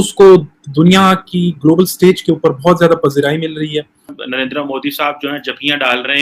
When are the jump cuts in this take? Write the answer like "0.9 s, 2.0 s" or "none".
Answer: 4.2 s